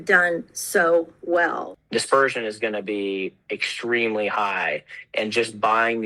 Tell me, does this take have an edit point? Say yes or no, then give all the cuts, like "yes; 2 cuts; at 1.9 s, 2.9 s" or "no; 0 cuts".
yes; 1 cut; at 1.7 s